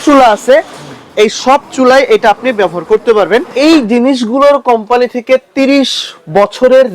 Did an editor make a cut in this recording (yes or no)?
yes